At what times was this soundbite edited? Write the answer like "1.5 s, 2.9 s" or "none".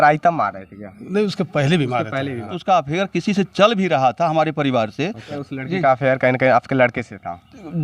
2.6 s, 5.3 s